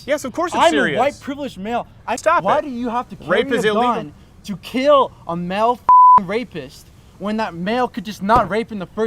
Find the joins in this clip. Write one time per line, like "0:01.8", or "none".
0:02.1